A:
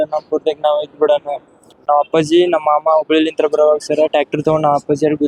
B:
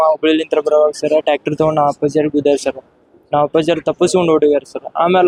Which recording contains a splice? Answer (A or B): A